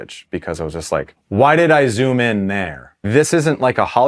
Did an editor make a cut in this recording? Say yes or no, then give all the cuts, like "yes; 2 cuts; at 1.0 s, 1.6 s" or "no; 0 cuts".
yes; 2 cuts; at 1.2 s, 3.0 s